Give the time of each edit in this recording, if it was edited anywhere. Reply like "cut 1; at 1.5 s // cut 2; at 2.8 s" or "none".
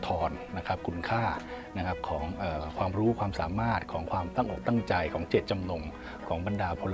none